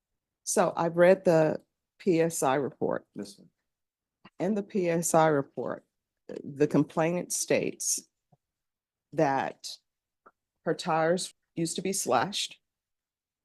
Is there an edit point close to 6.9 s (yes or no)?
no